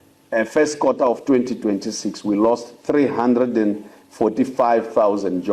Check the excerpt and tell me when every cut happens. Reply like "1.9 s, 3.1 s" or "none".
none